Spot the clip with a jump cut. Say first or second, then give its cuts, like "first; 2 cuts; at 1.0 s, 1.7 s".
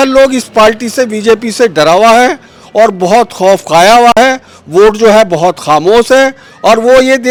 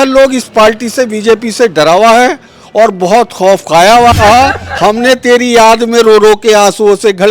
second; 1 cut; at 4.1 s